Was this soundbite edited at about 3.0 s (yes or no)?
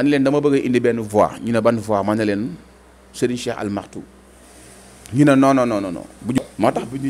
no